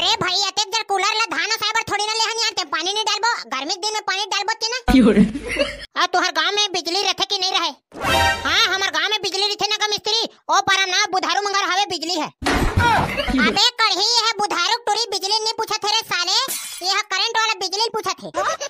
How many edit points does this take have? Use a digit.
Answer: 0